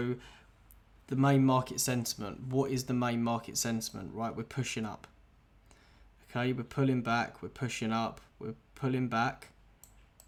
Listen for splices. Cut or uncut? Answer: uncut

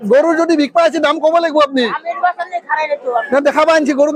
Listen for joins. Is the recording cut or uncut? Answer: uncut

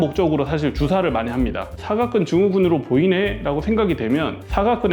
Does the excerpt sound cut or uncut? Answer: uncut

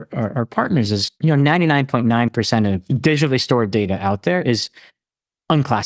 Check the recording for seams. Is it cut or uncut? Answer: cut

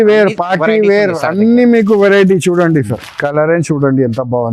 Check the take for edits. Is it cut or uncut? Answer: uncut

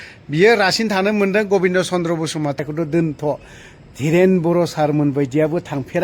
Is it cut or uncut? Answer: cut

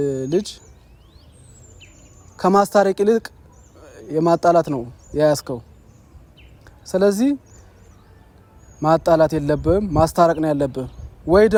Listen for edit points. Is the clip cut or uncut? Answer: uncut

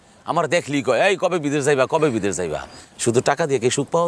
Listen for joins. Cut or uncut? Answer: cut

